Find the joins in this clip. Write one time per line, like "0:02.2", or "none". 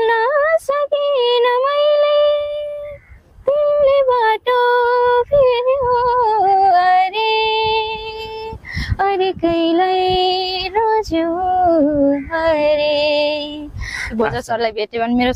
0:14.0